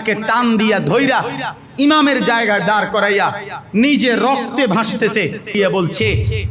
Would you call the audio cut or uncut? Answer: cut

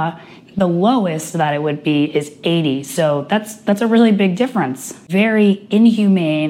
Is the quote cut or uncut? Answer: cut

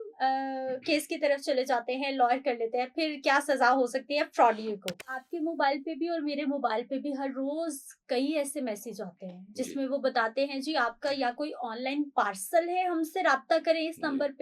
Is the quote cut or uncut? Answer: cut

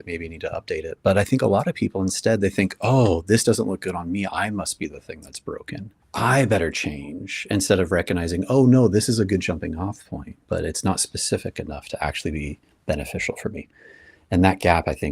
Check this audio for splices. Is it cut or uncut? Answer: cut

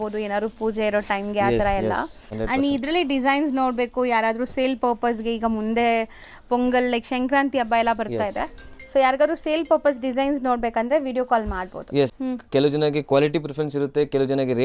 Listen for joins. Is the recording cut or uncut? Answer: cut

